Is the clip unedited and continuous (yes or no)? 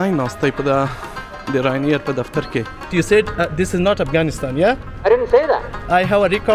no